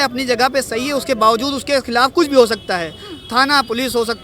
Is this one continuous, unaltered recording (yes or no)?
yes